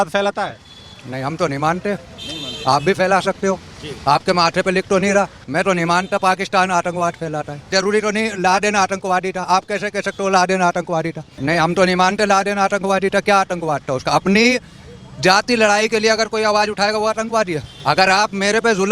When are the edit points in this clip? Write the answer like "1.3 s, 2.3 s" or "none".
5.4 s, 7.7 s, 11.2 s, 17.7 s